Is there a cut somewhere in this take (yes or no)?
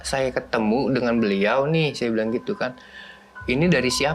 no